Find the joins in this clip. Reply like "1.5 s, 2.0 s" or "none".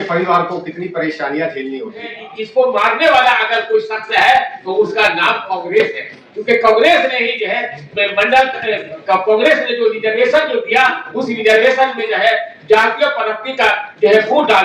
2.5 s